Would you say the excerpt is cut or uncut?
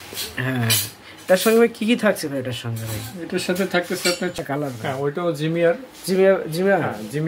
cut